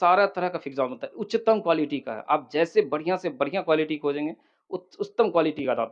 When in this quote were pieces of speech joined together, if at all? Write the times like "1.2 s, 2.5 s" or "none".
none